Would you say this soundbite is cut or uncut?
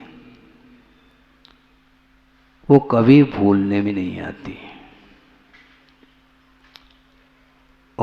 cut